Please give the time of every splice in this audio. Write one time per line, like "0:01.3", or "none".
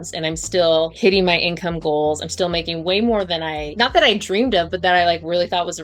0:00.9
0:03.6